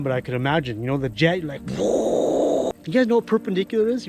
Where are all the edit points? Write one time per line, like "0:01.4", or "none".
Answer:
0:02.7